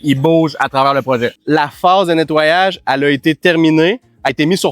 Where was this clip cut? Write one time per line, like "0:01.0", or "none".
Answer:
0:01.4